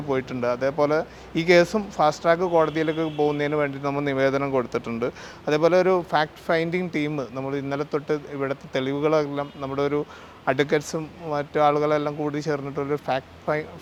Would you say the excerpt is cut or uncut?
uncut